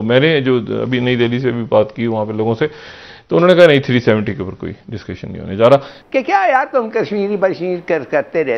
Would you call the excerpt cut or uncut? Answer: cut